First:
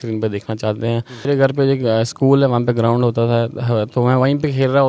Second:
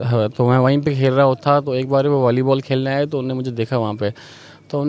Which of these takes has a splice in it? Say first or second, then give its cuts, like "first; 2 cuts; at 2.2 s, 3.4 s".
first; 1 cut; at 1.2 s